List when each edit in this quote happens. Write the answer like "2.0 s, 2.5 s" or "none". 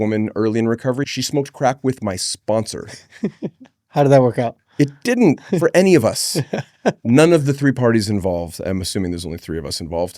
1.1 s